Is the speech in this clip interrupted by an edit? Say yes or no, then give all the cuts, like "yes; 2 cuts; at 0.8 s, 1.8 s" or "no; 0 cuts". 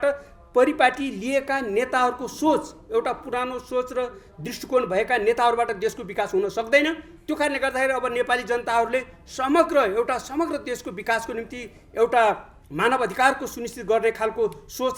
no; 0 cuts